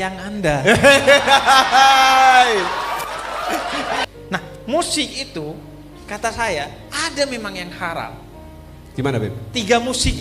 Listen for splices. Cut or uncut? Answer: cut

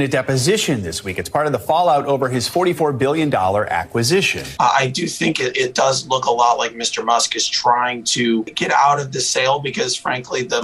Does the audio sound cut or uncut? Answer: cut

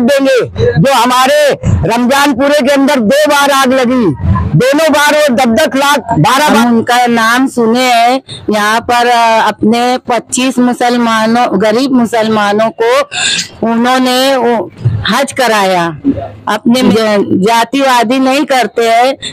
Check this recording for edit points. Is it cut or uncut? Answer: cut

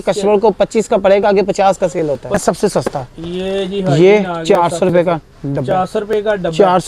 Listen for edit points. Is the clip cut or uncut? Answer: cut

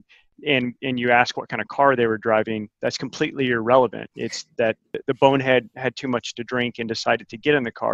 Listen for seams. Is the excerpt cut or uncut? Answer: cut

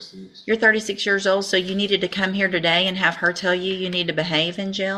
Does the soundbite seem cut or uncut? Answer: uncut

